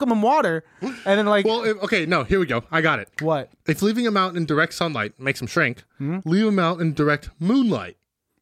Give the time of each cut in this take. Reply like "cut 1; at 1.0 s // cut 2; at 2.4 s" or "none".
none